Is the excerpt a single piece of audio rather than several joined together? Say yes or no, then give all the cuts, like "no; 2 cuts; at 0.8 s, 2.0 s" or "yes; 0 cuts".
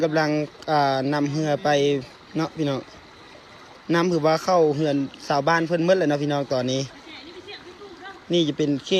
yes; 0 cuts